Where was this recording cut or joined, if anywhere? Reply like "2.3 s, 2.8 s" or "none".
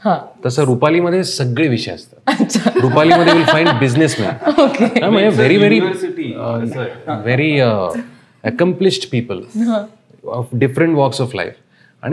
none